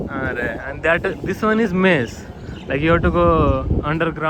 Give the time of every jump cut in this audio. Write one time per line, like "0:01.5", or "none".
none

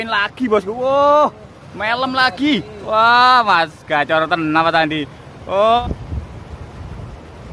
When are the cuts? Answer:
0:05.8

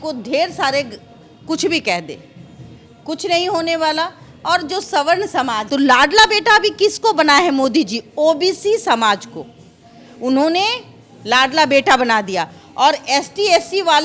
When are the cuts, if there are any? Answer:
0:05.6

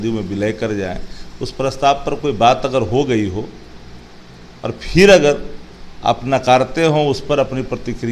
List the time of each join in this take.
none

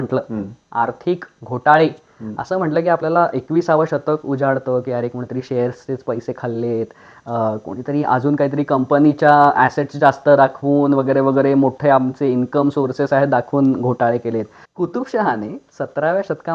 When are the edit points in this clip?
0:14.6

